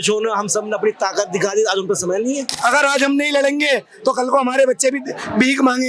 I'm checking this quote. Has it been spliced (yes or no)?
yes